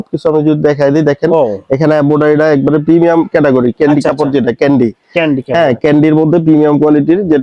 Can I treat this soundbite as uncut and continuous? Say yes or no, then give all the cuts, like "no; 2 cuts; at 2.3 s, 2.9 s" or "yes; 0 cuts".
yes; 0 cuts